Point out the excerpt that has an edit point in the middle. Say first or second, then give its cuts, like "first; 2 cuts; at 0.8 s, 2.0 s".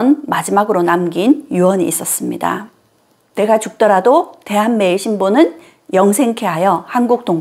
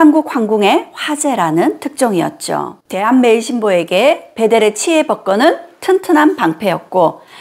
second; 1 cut; at 2.8 s